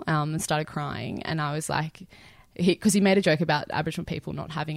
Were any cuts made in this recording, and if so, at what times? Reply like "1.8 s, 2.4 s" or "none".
none